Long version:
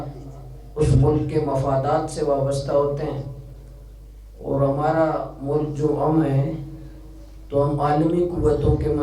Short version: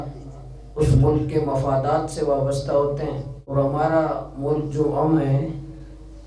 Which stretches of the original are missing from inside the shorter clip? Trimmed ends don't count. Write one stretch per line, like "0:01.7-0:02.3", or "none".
0:03.5-0:04.6